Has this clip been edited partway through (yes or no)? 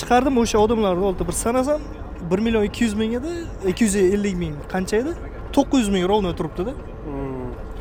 no